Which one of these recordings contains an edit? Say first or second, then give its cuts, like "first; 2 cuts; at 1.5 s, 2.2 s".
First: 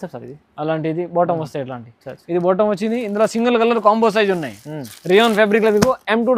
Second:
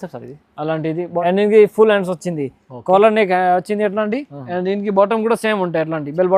second; 1 cut; at 1.1 s